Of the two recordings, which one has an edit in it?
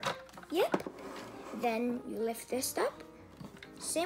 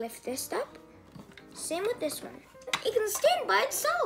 second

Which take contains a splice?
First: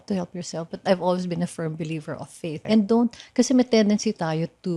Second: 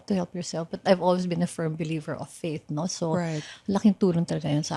first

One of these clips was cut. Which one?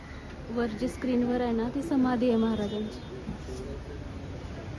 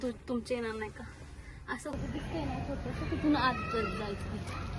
second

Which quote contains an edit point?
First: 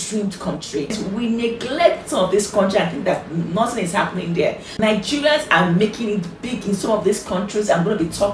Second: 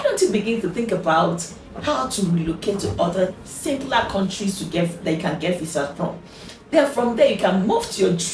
first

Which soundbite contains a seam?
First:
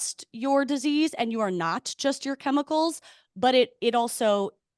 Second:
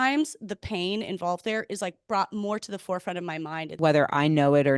second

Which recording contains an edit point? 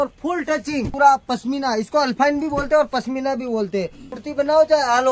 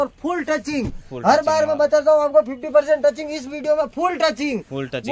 first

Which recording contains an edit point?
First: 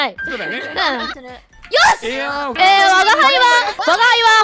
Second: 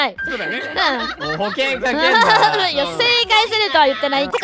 first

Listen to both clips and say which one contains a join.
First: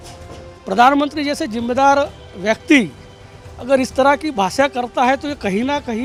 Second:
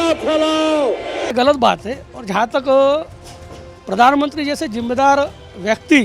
second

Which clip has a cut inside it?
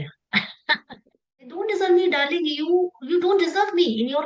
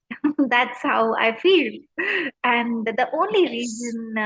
first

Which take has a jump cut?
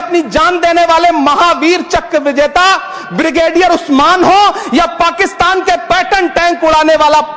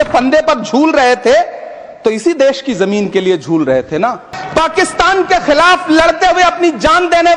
second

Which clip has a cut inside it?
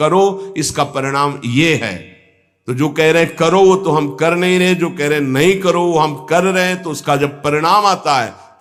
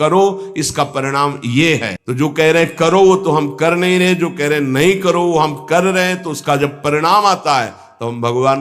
second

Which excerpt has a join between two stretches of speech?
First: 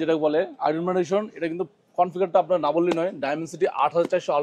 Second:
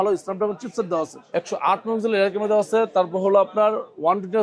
second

